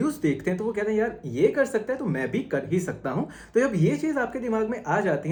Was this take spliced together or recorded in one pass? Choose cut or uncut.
uncut